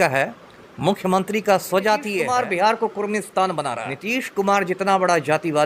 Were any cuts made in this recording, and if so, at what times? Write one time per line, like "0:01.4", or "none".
0:02.1
0:03.9